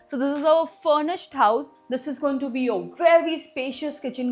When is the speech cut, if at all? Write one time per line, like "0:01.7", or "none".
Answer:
0:01.7